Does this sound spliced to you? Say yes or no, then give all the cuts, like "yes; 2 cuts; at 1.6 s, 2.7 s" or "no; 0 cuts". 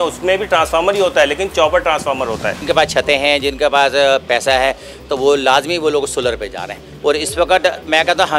yes; 1 cut; at 2.6 s